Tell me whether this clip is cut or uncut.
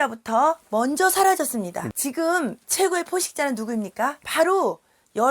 cut